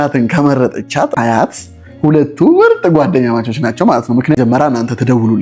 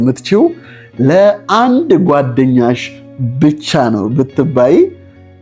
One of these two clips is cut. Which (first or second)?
first